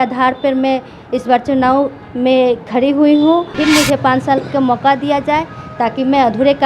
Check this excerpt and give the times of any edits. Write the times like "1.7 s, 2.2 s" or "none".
3.5 s